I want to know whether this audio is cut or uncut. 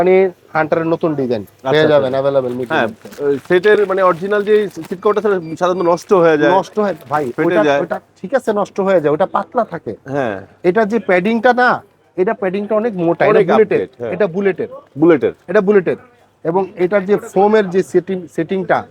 uncut